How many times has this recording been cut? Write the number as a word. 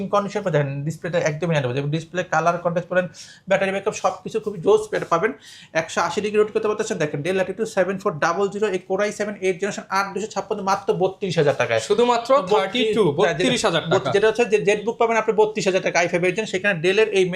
zero